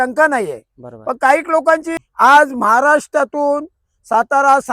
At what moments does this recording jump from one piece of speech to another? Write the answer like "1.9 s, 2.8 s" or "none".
1.9 s